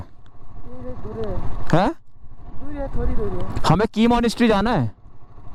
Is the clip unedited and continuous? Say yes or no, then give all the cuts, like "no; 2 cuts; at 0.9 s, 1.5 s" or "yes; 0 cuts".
yes; 0 cuts